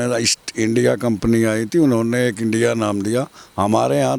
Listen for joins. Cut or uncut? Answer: uncut